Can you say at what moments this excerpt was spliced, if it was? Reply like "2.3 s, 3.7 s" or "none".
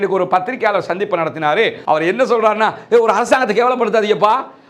1.8 s